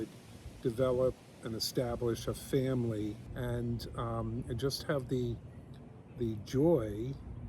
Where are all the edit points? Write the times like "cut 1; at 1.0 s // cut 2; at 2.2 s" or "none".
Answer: cut 1; at 3.3 s